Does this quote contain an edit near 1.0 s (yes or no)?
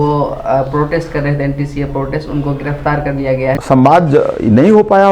no